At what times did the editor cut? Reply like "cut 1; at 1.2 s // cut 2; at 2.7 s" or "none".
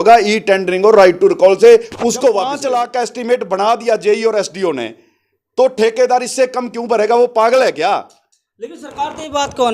cut 1; at 2.6 s